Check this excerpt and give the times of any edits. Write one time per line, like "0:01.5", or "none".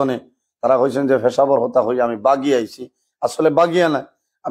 none